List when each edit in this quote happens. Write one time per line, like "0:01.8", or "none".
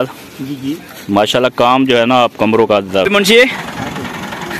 0:03.0